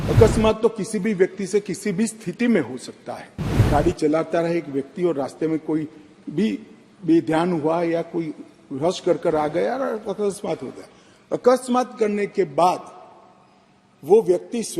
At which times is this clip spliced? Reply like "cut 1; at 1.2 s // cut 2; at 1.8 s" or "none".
cut 1; at 3.7 s